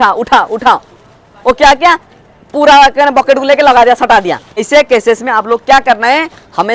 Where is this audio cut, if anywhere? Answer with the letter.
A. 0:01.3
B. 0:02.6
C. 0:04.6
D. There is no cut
C